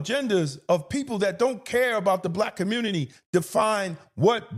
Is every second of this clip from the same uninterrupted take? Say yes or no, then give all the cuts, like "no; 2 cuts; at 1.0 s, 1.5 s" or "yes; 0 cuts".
yes; 0 cuts